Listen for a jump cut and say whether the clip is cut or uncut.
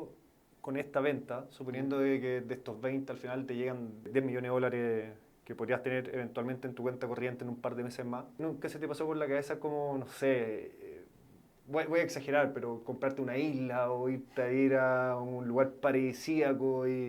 cut